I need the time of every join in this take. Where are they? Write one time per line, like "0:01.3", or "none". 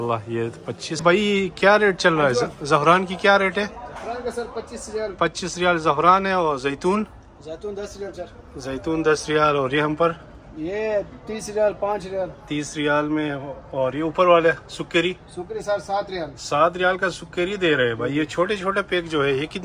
0:00.9